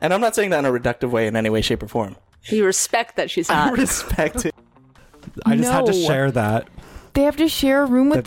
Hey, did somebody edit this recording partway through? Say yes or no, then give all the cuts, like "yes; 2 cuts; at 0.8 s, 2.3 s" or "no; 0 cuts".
yes; 1 cut; at 4.6 s